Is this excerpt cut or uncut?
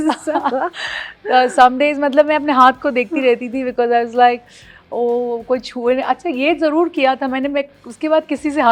uncut